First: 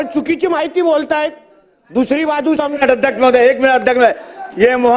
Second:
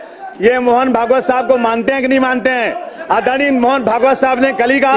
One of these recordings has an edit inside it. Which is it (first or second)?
first